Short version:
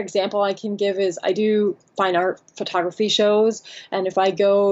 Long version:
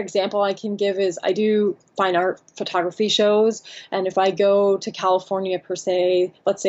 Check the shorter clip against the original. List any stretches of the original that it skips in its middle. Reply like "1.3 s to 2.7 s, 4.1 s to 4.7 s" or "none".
none